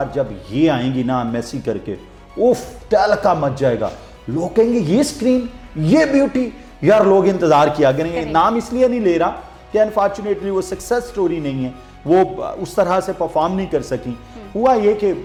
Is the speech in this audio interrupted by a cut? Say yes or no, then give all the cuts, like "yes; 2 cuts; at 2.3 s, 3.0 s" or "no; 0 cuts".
no; 0 cuts